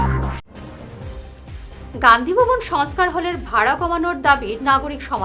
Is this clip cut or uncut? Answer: uncut